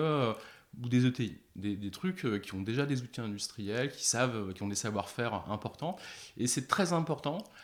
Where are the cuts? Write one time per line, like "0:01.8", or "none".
none